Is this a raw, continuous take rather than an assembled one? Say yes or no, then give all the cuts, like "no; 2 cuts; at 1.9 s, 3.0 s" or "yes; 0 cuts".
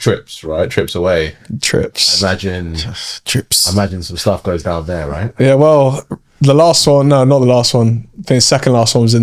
yes; 0 cuts